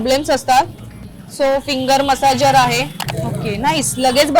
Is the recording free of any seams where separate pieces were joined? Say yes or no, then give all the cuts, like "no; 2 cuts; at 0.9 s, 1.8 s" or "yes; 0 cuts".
no; 1 cut; at 3.0 s